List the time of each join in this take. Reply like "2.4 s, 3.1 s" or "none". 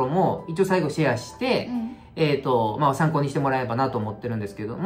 none